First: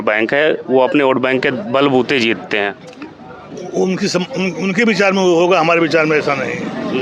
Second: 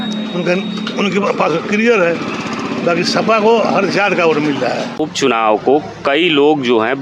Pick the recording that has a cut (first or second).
second